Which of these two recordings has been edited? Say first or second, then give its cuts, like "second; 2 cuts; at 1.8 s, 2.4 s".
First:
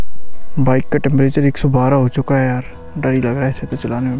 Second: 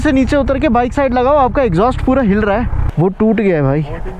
second; 1 cut; at 2.8 s